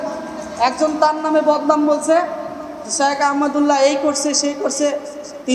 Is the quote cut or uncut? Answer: uncut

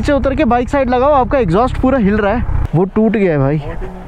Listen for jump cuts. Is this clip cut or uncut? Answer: cut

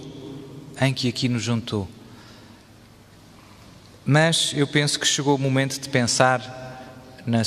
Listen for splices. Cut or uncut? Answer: uncut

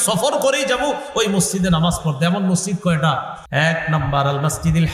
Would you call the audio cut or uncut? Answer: cut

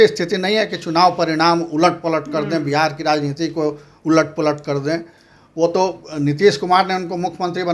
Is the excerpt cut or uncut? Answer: uncut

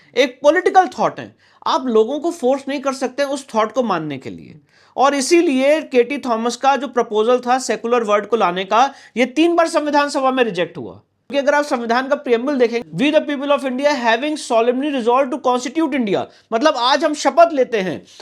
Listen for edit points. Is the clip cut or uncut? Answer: cut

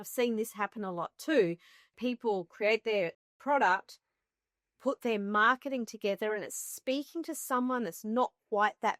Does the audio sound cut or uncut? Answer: cut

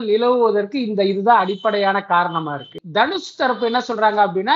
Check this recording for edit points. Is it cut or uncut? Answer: cut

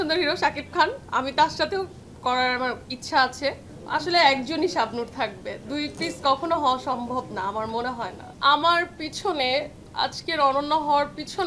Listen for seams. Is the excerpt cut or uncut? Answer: cut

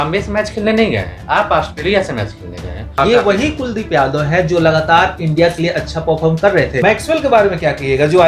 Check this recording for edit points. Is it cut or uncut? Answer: cut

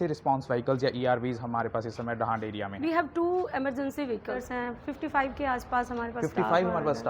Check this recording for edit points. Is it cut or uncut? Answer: cut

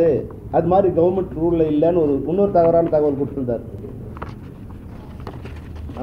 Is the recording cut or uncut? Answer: uncut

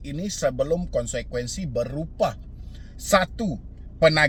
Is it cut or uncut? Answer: uncut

